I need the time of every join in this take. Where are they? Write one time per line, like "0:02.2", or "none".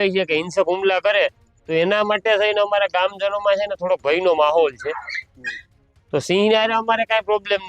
none